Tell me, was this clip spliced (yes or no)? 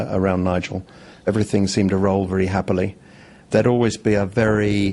no